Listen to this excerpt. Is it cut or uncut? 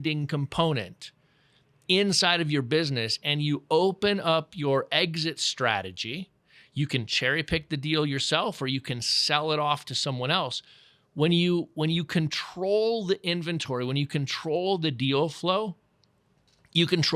uncut